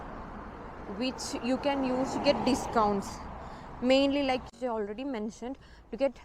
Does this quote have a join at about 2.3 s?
no; 1 cut; at 4.5 s

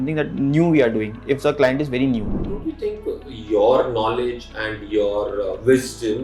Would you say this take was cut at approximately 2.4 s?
yes; 1 cut; at 2.4 s

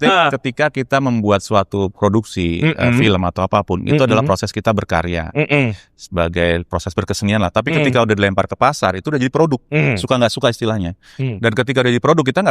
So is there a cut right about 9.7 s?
yes; 1 cut; at 9.7 s

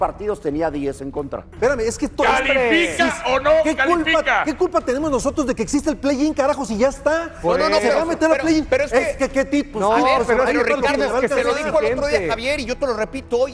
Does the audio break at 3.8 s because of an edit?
no; 1 cut; at 1.4 s

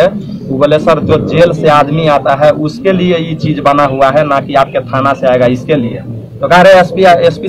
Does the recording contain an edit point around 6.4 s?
no; 0 cuts

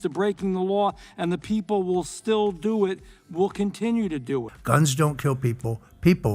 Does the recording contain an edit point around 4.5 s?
yes; 1 cut; at 4.5 s

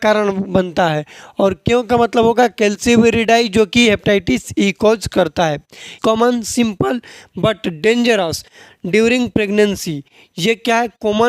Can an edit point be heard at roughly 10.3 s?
no; 1 cut; at 6.0 s

